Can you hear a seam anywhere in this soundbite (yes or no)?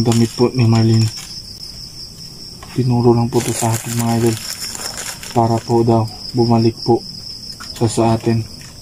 no